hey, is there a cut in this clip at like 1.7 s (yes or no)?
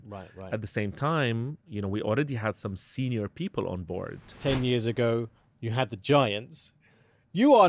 no